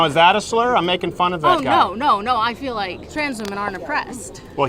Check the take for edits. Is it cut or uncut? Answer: cut